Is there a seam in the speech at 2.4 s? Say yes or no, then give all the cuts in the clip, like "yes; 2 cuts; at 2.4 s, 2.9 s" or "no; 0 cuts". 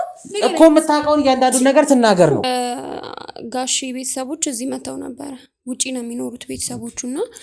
yes; 1 cut; at 2.4 s